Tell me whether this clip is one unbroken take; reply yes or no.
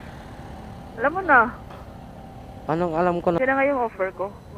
no